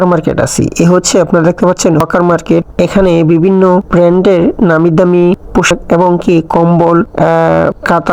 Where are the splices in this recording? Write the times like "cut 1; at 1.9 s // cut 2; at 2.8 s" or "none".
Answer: none